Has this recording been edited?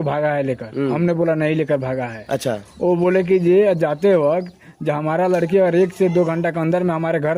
no; 0 cuts

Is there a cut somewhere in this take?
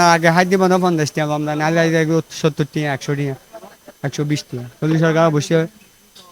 no; 0 cuts

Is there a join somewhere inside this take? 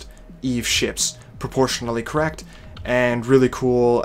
no; 0 cuts

